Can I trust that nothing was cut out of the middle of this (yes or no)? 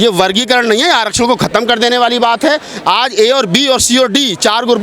yes